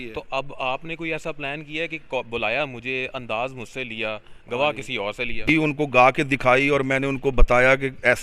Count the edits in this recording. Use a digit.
1